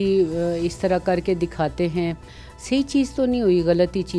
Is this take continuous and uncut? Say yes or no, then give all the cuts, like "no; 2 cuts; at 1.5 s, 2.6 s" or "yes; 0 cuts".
yes; 0 cuts